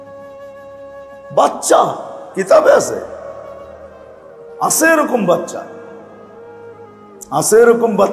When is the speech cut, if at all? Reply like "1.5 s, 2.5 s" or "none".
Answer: 1.2 s